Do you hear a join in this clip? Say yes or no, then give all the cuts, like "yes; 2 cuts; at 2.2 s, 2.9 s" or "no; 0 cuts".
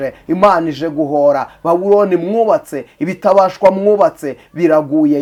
no; 0 cuts